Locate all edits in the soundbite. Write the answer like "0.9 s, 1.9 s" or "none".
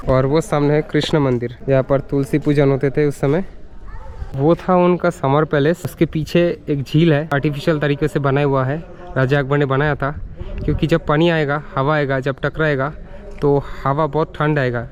none